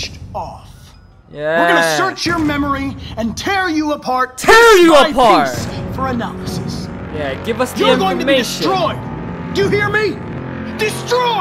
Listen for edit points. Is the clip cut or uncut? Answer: uncut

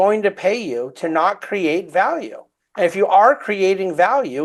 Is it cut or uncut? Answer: uncut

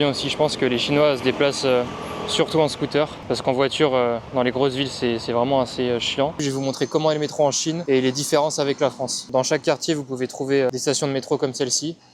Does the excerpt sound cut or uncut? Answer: uncut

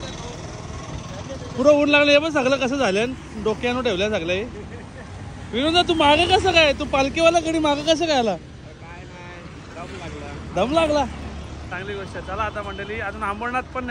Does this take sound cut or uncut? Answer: uncut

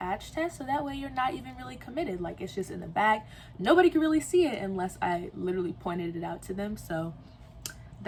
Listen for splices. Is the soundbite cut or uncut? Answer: uncut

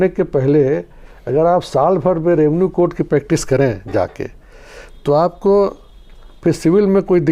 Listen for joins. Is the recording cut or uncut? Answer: uncut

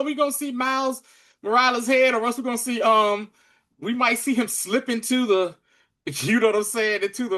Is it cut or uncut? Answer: uncut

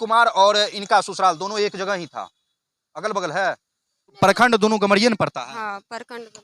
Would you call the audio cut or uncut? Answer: cut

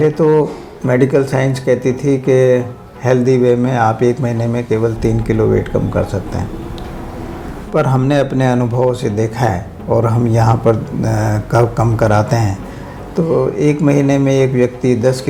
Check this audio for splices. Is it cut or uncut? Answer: uncut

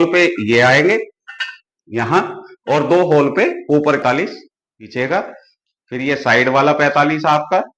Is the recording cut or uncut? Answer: cut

